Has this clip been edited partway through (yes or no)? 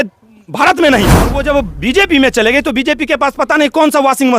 yes